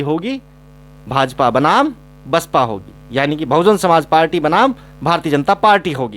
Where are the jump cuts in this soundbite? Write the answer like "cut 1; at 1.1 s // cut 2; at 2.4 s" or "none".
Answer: none